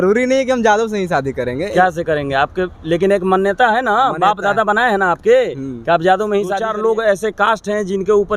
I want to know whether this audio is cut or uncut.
cut